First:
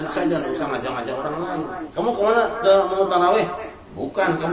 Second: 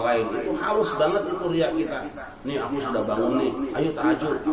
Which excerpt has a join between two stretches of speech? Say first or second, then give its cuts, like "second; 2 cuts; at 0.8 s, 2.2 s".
first; 1 cut; at 1.8 s